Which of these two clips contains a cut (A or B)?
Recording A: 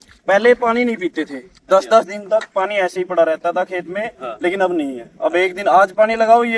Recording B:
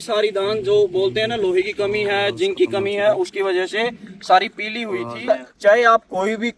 B